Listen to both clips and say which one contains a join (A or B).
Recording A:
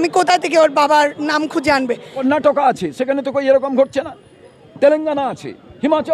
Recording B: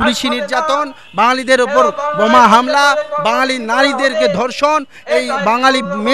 A